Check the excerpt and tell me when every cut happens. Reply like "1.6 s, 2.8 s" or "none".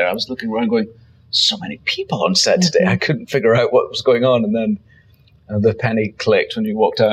none